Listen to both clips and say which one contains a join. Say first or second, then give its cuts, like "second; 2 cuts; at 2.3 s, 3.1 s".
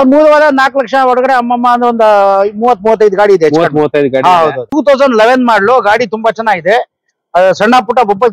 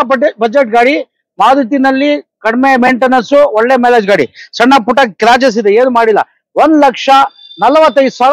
first; 1 cut; at 4.7 s